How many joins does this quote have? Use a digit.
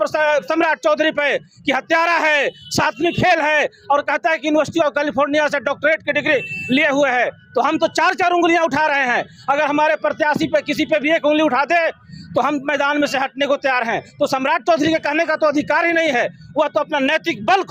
0